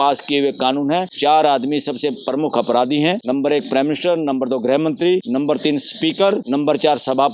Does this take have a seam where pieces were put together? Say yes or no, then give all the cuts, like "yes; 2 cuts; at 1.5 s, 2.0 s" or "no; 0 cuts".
yes; 4 cuts; at 1.1 s, 3.2 s, 5.3 s, 6.4 s